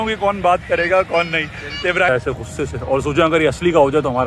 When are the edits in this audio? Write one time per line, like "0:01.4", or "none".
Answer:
0:02.1